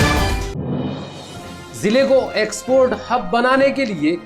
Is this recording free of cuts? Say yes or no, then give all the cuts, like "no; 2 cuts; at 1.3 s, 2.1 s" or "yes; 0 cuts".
no; 1 cut; at 1.5 s